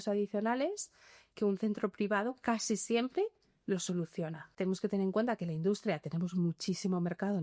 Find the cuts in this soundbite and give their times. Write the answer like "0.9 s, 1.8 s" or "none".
4.4 s